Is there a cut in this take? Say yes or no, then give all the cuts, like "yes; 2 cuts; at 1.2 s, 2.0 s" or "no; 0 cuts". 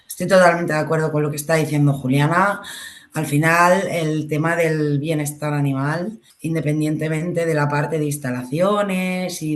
yes; 1 cut; at 6.3 s